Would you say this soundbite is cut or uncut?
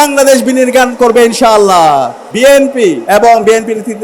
cut